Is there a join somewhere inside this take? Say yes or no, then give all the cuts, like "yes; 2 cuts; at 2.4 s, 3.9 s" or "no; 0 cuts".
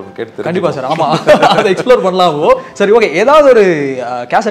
no; 0 cuts